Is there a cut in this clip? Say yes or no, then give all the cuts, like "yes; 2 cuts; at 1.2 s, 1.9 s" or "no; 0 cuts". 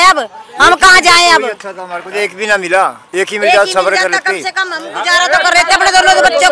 no; 0 cuts